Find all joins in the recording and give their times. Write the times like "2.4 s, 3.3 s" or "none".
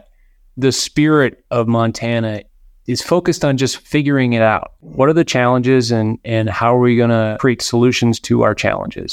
4.8 s, 7.3 s